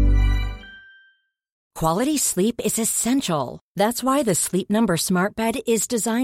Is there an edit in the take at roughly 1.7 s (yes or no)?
yes